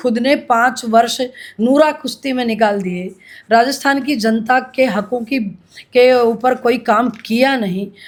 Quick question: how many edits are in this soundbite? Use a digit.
0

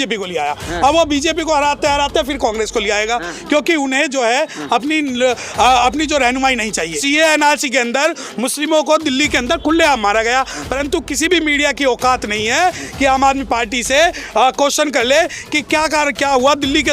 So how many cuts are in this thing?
1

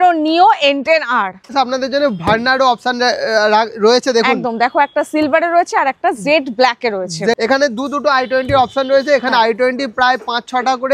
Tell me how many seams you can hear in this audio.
2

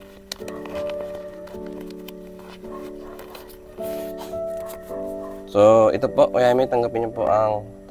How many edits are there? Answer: 1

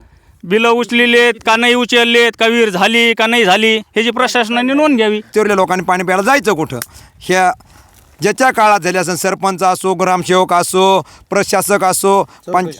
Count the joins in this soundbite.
1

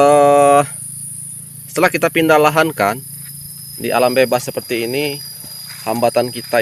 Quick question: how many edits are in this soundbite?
0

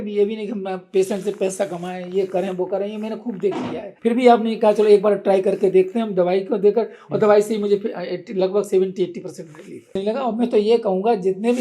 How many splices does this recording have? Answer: 2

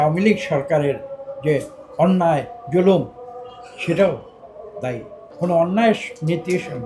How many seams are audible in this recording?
1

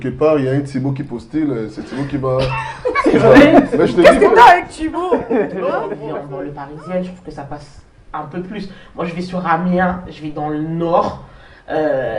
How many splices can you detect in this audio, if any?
1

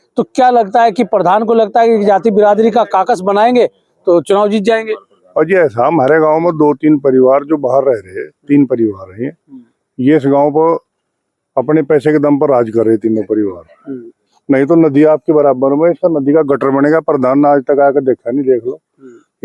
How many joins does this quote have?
0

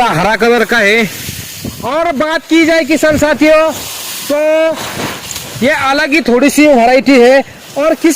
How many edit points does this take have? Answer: 0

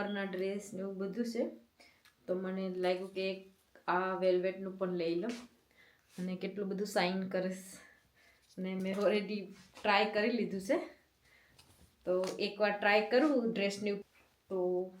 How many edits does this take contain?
1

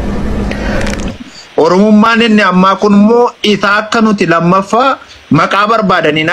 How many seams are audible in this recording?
1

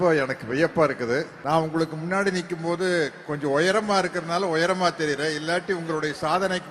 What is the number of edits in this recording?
1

